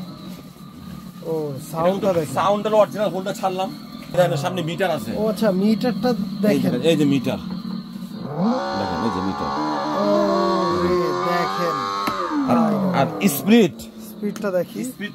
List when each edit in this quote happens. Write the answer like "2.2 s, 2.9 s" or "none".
4.1 s